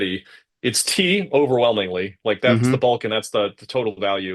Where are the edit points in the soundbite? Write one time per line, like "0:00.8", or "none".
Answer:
none